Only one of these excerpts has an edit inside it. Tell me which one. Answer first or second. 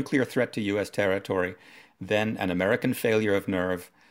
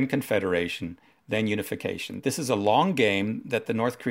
second